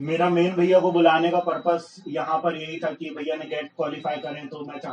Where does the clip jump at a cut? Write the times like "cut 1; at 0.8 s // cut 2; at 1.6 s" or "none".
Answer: none